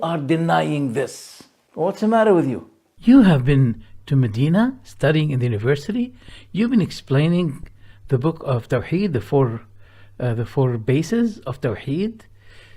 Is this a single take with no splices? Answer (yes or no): yes